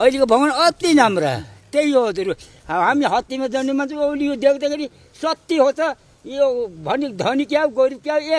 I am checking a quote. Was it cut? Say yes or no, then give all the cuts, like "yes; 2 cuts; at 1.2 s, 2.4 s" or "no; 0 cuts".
no; 0 cuts